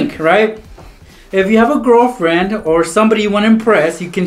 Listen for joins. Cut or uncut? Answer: cut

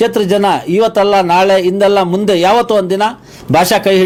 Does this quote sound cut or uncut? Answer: uncut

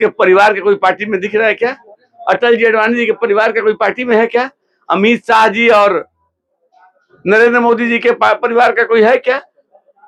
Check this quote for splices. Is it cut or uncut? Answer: uncut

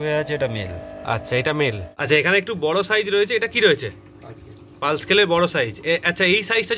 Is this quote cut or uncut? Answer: cut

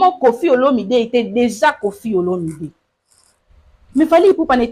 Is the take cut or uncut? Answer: uncut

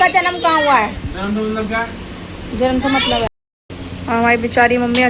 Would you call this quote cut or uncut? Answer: cut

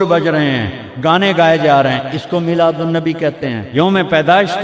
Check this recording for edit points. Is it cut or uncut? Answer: cut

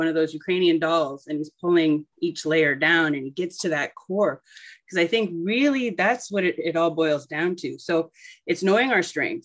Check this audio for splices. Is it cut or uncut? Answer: uncut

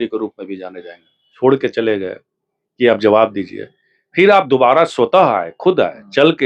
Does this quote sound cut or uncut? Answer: cut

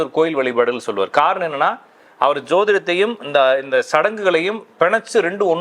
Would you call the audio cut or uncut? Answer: uncut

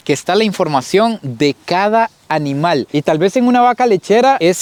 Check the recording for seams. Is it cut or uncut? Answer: uncut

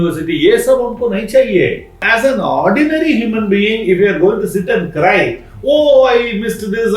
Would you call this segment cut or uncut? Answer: cut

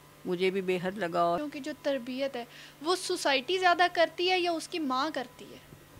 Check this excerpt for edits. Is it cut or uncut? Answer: cut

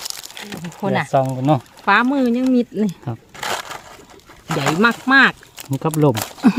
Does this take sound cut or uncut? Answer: uncut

